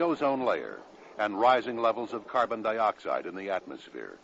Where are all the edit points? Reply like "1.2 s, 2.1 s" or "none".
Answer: none